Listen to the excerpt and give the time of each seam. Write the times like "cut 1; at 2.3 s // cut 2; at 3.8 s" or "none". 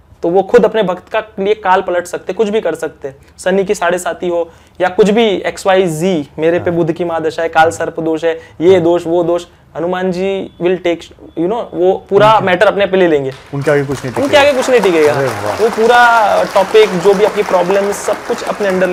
none